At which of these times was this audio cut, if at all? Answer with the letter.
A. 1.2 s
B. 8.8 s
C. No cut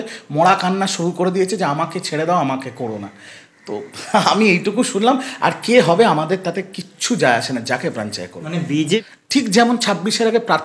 B